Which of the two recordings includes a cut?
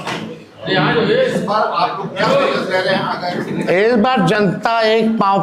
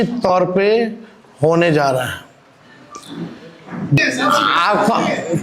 second; 1 cut; at 4.0 s

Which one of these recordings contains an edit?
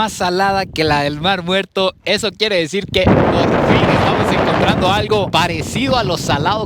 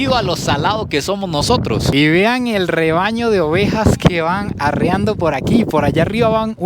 second; 1 cut; at 1.9 s

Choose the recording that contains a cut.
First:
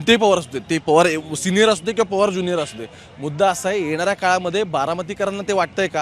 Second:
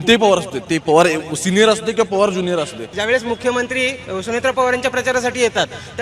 second; 1 cut; at 2.9 s

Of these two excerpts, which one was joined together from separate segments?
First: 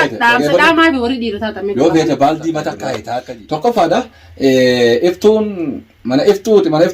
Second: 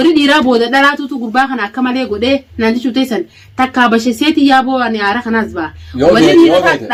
first; 1 cut; at 3.1 s

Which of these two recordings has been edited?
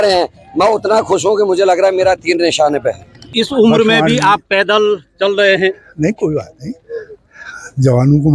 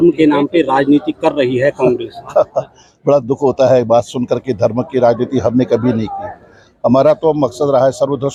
first; 1 cut; at 3.3 s

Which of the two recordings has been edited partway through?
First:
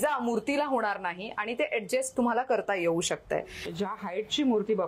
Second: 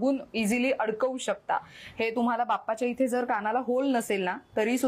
first; 1 cut; at 3.6 s

